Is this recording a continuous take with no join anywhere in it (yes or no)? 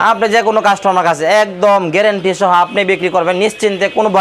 yes